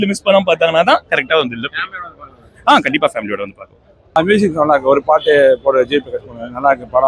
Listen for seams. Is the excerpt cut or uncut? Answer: cut